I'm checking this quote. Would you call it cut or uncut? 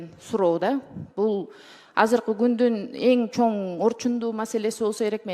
uncut